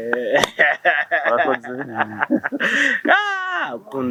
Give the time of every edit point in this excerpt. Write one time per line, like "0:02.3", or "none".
none